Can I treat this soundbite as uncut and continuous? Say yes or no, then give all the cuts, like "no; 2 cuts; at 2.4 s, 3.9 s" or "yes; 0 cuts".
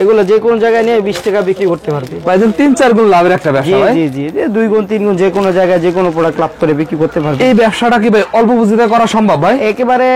yes; 0 cuts